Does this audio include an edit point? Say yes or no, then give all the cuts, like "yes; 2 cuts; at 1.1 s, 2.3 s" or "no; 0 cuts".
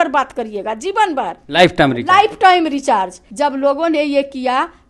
yes; 1 cut; at 3.2 s